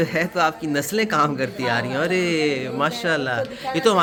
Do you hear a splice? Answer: no; 0 cuts

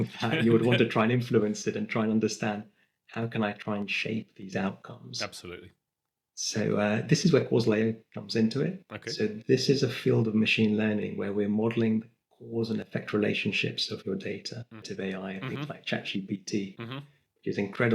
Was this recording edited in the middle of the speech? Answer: yes; 1 cut; at 14.9 s

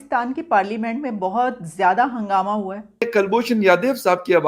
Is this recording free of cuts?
no; 1 cut; at 3.1 s

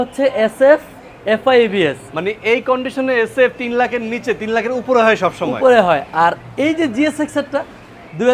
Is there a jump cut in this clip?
no; 0 cuts

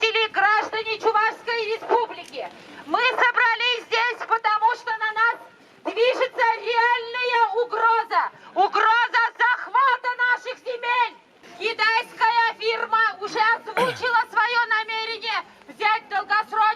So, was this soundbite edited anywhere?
no; 0 cuts

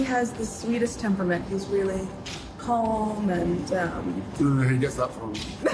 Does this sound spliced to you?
no; 0 cuts

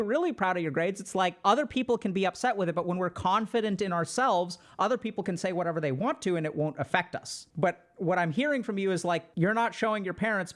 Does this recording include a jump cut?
yes; 3 cuts; at 1.4 s, 7.4 s, 9.3 s

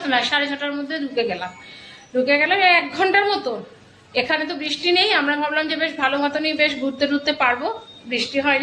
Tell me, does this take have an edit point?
no; 0 cuts

